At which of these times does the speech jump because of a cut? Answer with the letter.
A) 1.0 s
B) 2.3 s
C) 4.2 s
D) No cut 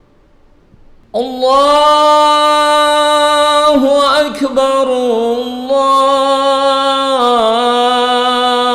A